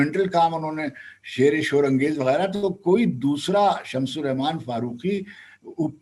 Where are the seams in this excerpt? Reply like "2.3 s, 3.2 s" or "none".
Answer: none